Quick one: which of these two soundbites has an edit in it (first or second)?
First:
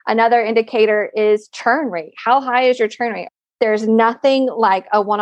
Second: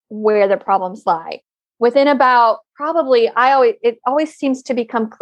first